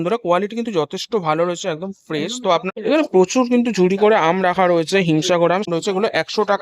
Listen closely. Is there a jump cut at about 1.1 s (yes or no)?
no